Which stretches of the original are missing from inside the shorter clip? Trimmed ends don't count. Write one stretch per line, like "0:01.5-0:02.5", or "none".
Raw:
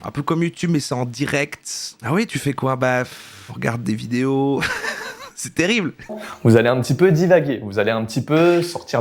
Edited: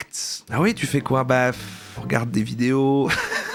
none